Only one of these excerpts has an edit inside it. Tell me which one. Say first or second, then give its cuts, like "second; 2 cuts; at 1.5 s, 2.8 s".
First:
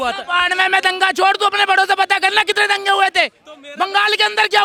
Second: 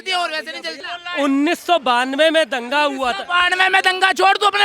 second; 1 cut; at 0.9 s